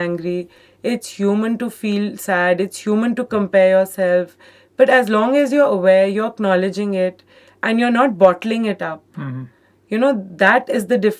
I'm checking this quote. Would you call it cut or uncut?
uncut